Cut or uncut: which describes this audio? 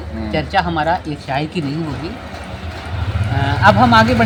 uncut